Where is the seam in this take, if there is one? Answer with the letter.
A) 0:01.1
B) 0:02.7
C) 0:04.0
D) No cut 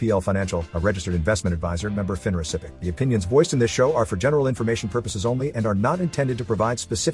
B